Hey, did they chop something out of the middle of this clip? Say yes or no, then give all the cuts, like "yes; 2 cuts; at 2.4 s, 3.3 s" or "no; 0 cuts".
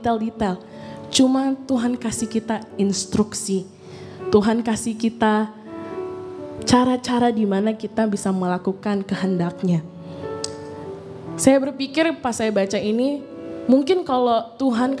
no; 0 cuts